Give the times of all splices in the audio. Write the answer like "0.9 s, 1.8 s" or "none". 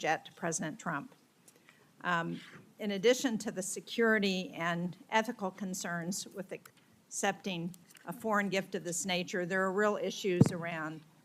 none